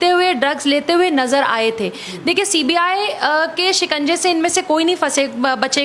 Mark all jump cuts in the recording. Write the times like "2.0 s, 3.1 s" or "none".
none